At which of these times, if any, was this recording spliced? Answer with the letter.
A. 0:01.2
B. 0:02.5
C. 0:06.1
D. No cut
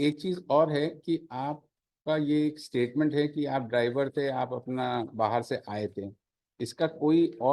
D